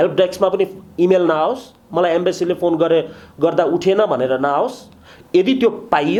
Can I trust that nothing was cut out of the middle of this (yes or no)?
yes